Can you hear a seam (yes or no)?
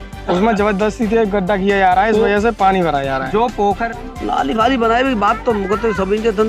yes